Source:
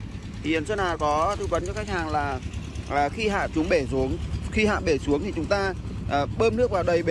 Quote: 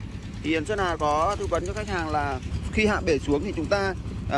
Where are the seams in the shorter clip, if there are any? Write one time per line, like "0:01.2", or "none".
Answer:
0:02.5